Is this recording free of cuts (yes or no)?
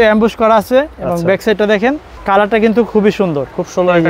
no